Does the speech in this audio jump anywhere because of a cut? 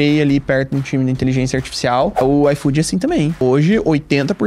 yes; 2 cuts; at 2.2 s, 3.4 s

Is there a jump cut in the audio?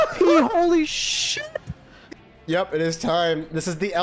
yes; 1 cut; at 2.1 s

